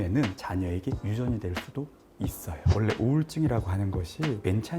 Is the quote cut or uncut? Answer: cut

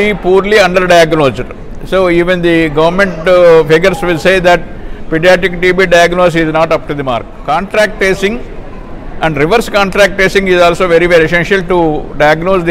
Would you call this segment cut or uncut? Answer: cut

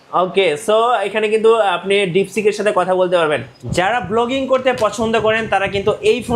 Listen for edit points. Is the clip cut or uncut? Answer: cut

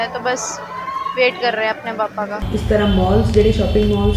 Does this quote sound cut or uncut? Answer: cut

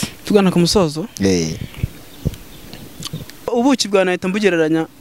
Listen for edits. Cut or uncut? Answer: cut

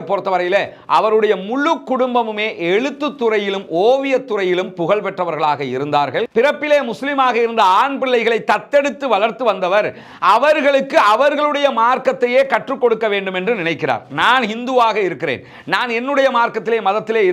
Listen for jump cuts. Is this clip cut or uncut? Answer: cut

